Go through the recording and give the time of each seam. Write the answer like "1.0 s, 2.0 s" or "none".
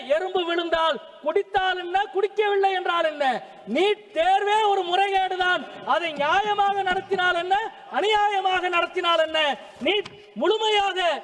none